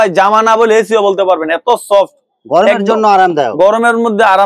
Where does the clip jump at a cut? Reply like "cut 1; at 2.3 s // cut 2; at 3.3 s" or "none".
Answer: none